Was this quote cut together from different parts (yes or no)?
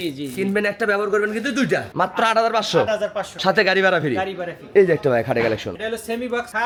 no